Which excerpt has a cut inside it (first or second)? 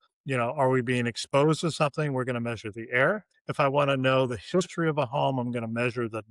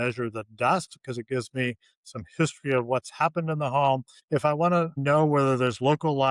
second